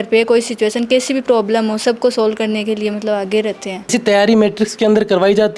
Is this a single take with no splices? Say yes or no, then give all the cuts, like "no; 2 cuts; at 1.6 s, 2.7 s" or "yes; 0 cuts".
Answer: no; 1 cut; at 3.9 s